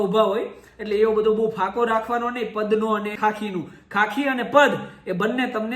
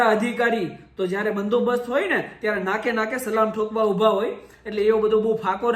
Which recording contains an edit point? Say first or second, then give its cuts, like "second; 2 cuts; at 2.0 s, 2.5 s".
first; 1 cut; at 3.1 s